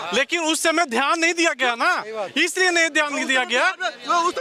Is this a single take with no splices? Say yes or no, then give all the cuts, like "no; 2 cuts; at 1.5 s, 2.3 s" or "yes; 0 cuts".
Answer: yes; 0 cuts